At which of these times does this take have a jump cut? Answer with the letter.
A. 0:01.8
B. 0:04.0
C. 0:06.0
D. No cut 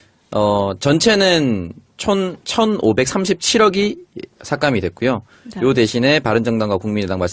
C